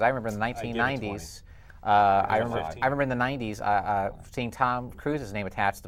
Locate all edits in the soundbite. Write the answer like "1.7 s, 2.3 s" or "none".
none

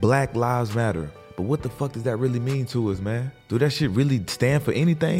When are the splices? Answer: 1.2 s, 3.3 s

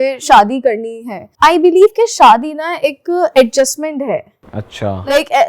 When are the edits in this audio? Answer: 1.3 s

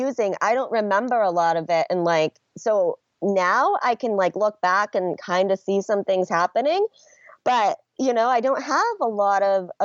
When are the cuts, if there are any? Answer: none

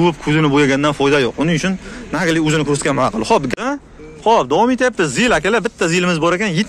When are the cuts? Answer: 3.5 s

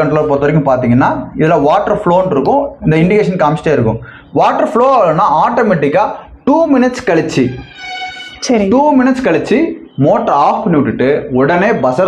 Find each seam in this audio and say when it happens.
none

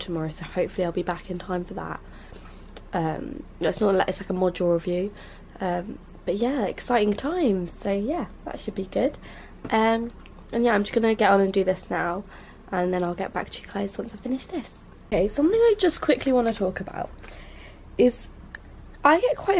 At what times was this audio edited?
4.6 s

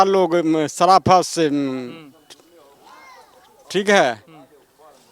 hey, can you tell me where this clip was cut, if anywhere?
none

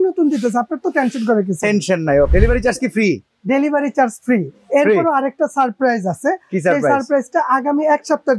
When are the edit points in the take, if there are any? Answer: 2.3 s

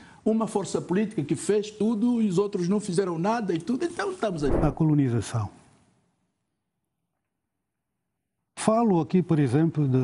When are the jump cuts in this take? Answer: 4.5 s

